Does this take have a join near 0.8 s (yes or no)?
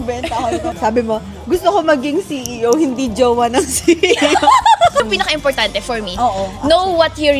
yes